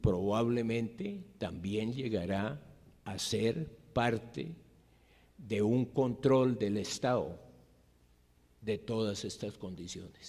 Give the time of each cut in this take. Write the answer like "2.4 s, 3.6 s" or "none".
6.2 s